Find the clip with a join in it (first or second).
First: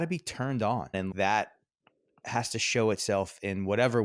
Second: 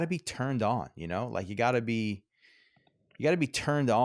first